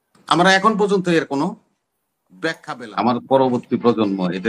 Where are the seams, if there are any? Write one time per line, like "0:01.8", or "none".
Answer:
0:02.6